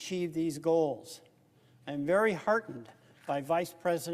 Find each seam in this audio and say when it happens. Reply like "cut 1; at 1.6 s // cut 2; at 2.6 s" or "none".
none

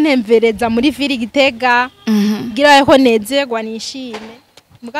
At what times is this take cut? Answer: none

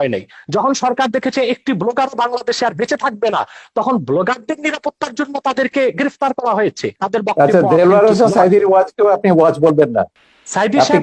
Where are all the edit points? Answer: cut 1; at 6.9 s

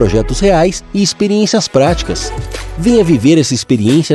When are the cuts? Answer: cut 1; at 3.0 s

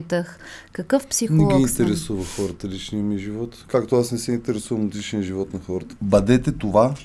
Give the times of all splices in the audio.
cut 1; at 5.9 s

